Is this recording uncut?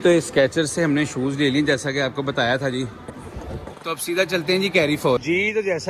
yes; 0 cuts

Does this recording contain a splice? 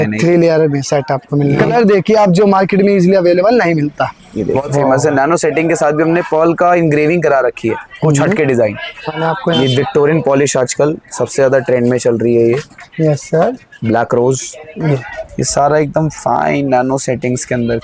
yes; 4 cuts; at 1.7 s, 4.6 s, 9.2 s, 15.1 s

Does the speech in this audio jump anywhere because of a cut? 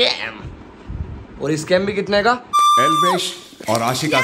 yes; 1 cut; at 2.5 s

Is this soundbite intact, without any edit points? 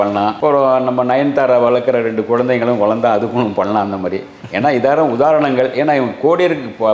yes; 0 cuts

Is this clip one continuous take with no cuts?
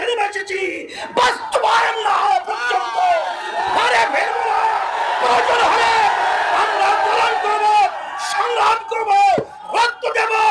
yes; 0 cuts

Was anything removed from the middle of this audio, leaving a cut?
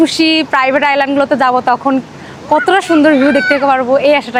no; 0 cuts

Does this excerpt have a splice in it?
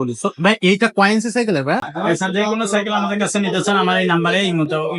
yes; 1 cut; at 1.9 s

